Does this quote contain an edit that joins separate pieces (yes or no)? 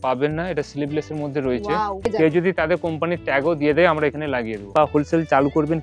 yes